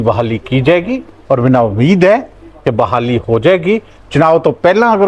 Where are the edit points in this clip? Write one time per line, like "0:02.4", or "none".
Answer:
none